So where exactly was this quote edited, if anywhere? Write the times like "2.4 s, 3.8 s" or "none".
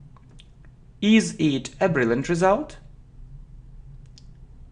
2.2 s